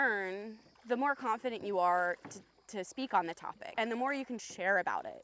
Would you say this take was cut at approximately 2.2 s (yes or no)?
no